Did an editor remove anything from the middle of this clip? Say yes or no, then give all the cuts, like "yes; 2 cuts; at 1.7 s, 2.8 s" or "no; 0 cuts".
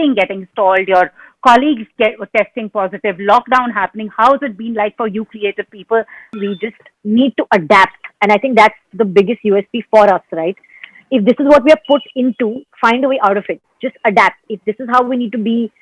yes; 1 cut; at 6.4 s